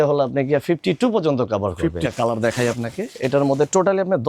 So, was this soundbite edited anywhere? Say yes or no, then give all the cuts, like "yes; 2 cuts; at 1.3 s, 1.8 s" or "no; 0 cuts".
yes; 1 cut; at 2.0 s